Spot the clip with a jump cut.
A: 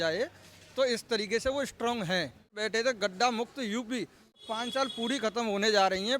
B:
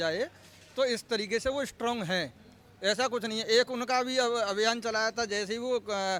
A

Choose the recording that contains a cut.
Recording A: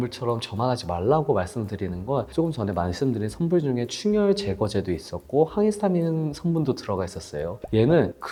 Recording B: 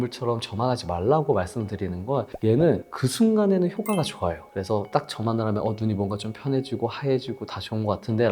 B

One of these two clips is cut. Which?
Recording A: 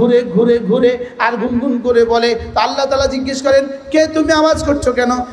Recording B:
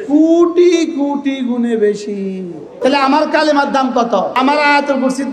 B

